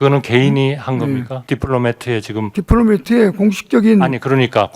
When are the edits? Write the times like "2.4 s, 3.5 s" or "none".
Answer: 1.3 s, 2.5 s